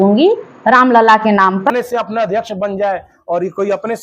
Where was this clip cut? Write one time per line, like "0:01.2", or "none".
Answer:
0:01.7